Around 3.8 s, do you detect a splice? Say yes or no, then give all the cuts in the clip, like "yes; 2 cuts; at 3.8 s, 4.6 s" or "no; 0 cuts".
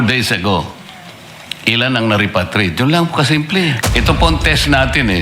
yes; 1 cut; at 3.8 s